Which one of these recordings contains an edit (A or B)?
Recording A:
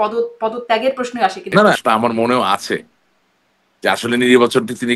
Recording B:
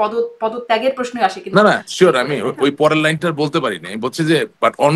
A